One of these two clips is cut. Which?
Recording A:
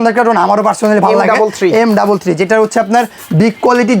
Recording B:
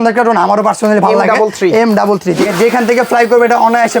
B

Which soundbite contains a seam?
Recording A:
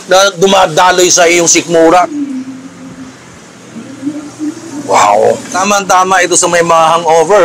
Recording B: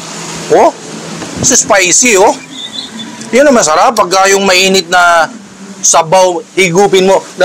A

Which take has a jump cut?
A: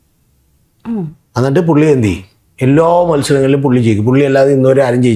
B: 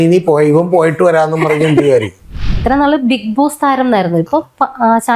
B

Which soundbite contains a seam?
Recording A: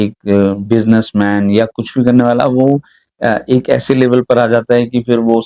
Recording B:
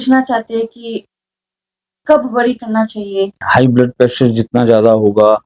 B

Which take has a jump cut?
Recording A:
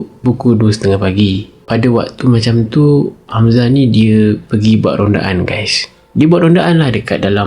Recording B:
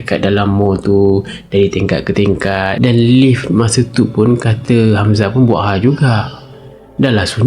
B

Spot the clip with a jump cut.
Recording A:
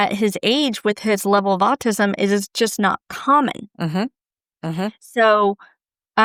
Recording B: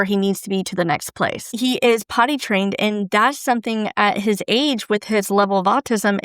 B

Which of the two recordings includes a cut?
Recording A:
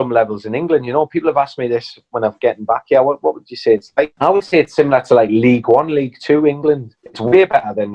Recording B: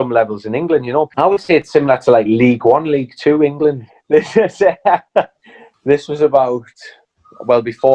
B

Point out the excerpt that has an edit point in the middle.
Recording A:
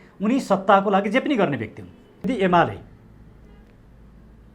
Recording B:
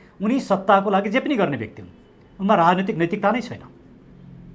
A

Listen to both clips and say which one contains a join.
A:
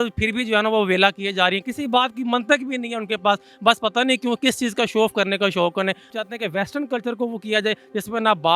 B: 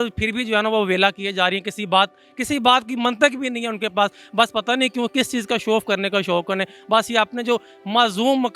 A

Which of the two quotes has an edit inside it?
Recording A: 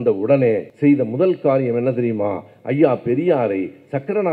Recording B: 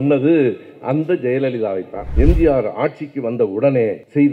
B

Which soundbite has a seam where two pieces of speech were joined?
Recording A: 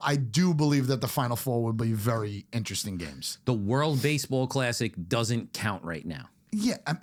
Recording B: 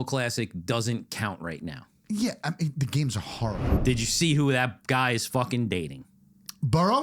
B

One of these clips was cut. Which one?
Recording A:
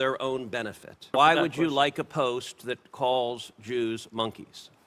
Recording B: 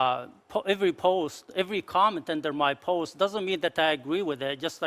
A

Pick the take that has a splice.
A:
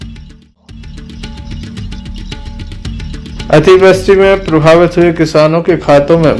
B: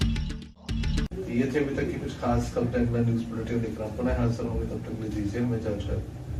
A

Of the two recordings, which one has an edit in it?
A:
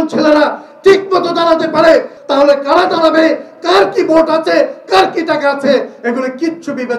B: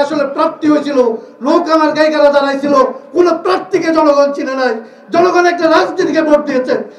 A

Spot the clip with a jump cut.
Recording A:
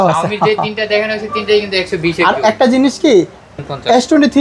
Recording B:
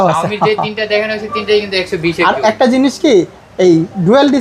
A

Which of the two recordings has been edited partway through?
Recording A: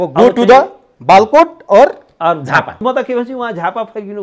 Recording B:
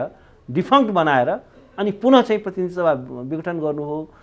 A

